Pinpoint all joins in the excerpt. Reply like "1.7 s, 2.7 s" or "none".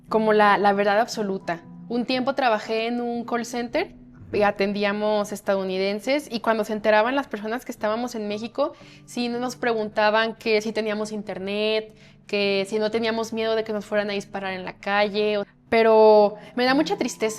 15.5 s